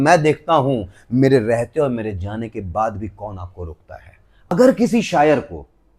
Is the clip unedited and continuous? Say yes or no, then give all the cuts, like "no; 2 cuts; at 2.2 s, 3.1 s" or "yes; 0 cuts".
no; 1 cut; at 4.5 s